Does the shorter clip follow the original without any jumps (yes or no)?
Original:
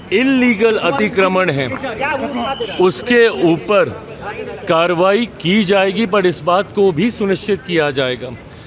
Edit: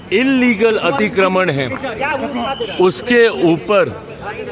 yes